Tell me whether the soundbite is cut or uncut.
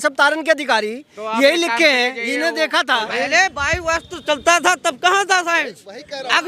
cut